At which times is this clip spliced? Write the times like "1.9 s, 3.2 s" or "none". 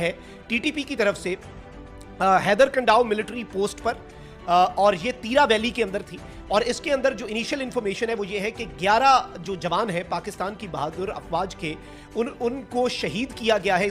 none